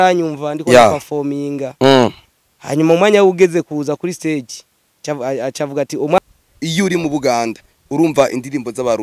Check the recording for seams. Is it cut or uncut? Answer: cut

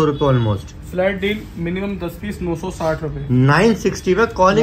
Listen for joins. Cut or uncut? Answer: uncut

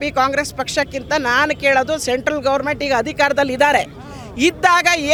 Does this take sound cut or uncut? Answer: uncut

